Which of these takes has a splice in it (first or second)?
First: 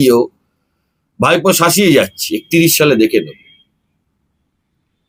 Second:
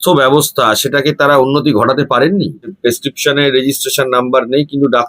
second